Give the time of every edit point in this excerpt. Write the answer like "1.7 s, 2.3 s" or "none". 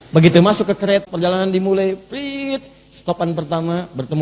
1.0 s